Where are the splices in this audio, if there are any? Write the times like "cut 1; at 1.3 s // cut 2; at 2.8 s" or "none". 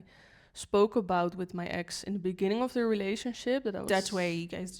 cut 1; at 3.9 s